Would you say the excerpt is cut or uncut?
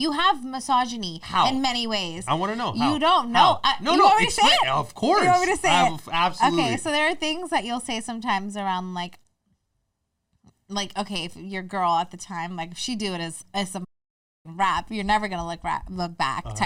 uncut